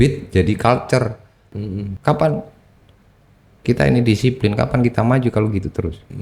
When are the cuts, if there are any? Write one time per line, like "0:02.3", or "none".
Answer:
0:01.9